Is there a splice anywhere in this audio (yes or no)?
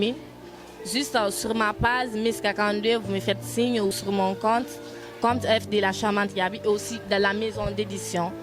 yes